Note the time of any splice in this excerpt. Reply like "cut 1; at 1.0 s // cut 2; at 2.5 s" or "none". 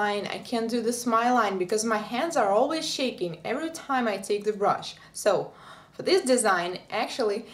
none

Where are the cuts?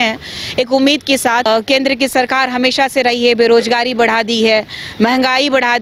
cut 1; at 1.5 s

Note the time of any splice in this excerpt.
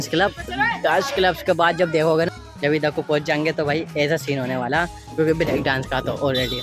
cut 1; at 2.3 s

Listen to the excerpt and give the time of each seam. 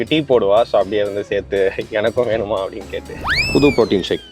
cut 1; at 3.3 s

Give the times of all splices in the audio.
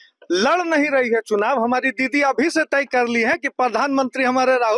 none

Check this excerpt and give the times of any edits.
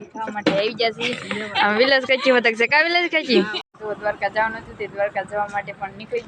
cut 1; at 3.6 s

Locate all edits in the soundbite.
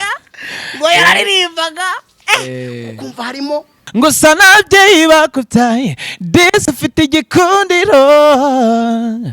cut 1; at 3.8 s

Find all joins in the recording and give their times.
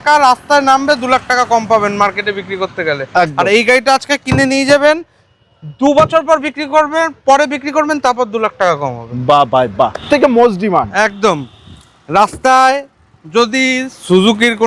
none

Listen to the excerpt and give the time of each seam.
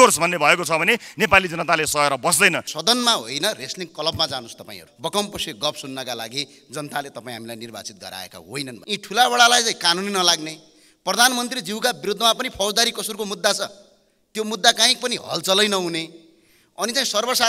cut 1; at 2.7 s // cut 2; at 4.9 s // cut 3; at 8.8 s

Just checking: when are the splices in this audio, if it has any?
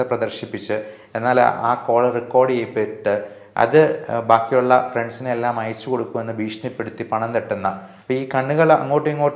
cut 1; at 7.9 s

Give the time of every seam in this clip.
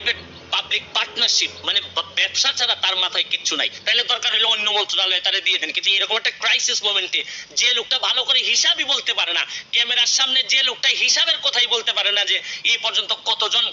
cut 1; at 3.8 s

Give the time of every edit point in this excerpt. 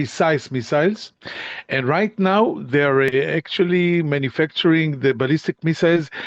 cut 1; at 3.1 s

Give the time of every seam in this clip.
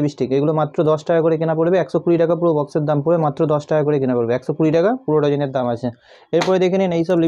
none

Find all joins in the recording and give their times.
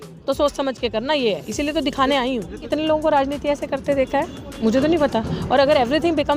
cut 1; at 2.6 s

